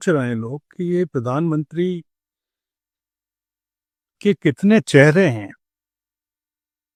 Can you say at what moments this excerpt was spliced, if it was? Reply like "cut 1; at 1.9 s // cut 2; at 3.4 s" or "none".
none